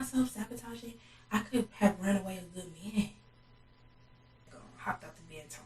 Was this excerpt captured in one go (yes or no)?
no